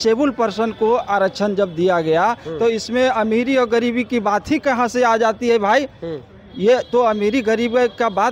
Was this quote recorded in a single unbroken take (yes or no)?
yes